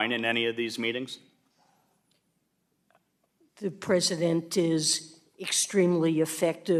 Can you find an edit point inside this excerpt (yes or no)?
no